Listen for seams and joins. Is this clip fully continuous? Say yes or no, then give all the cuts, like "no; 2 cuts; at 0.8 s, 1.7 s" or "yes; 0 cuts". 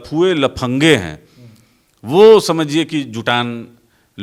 yes; 0 cuts